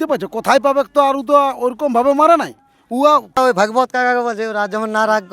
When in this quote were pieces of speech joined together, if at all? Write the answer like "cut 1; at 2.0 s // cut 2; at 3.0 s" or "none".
cut 1; at 3.4 s